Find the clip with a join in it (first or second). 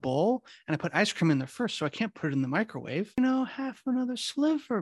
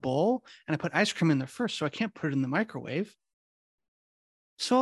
first